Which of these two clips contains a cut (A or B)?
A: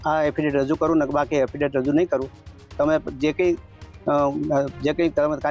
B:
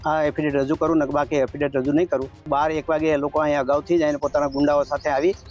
B